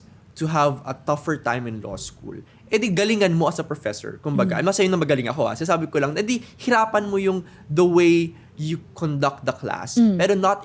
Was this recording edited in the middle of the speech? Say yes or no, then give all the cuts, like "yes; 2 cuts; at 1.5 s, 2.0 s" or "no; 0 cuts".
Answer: no; 0 cuts